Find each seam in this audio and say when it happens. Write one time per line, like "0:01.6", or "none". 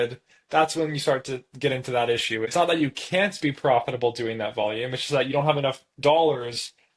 0:02.5

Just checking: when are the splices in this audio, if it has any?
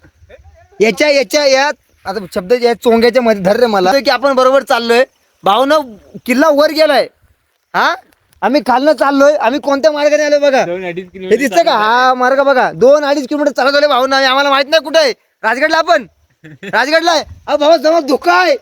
0:03.9

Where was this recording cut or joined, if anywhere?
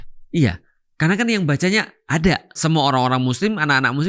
0:02.6

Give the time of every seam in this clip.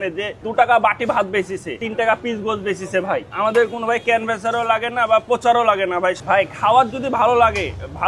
0:01.8
0:03.3
0:06.2

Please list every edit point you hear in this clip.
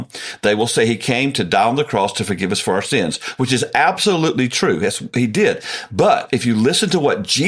0:06.2

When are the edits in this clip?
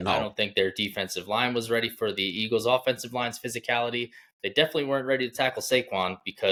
none

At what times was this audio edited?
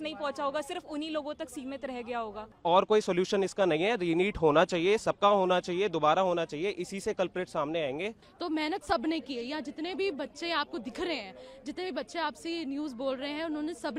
0:02.5
0:08.3

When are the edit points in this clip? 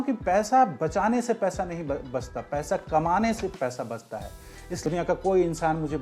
0:04.8

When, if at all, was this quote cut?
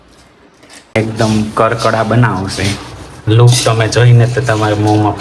0:00.9

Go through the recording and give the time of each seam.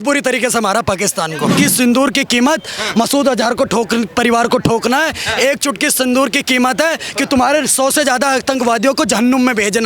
0:01.5

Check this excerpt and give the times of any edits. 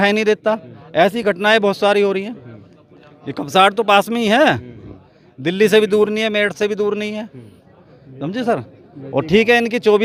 none

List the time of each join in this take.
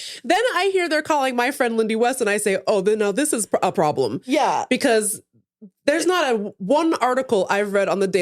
none

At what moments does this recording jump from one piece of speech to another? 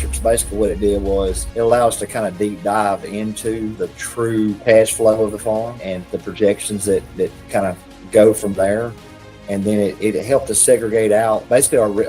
0:01.4

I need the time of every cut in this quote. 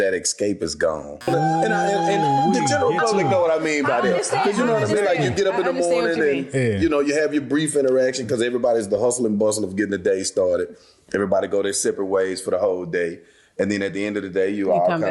0:01.3

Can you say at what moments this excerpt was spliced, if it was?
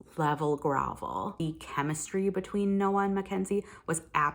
0:01.4

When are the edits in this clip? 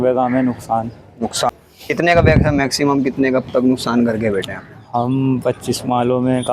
0:01.4

